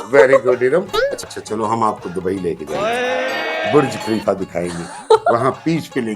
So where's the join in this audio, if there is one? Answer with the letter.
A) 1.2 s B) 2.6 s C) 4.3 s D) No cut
A